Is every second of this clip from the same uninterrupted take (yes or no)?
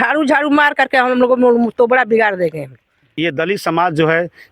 no